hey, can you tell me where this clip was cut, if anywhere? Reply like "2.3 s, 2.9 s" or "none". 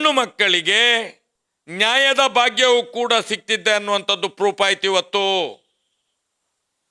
none

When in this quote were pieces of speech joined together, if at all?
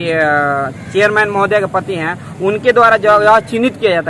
none

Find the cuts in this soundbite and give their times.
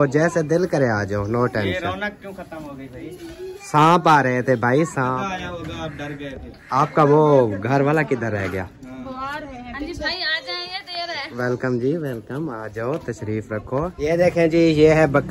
5.1 s, 14.0 s

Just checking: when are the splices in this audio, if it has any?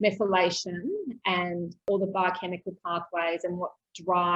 1.8 s

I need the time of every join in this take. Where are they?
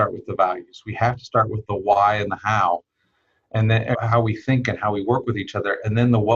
3.9 s

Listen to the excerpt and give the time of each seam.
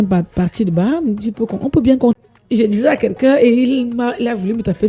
2.2 s

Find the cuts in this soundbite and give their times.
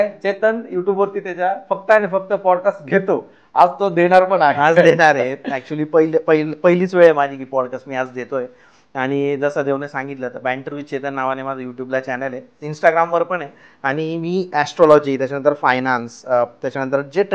none

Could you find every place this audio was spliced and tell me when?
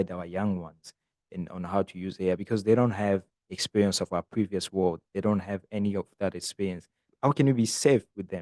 7.0 s

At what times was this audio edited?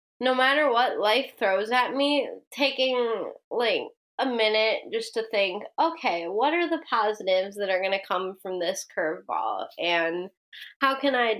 4.0 s

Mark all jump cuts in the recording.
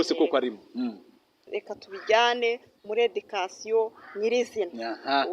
1.5 s

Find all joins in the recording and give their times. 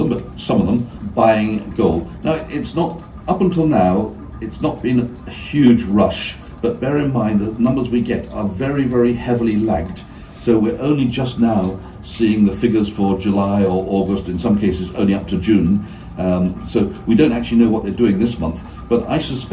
1.0 s

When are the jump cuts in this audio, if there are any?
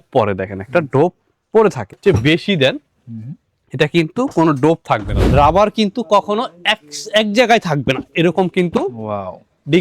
2.0 s, 5.2 s

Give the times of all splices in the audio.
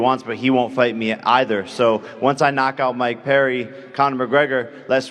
2.1 s

